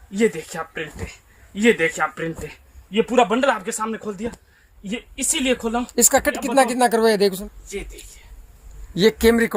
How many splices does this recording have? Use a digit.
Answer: 1